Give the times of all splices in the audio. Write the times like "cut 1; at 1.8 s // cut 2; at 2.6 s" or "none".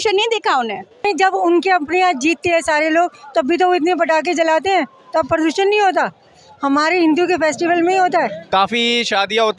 cut 1; at 1.1 s // cut 2; at 8.4 s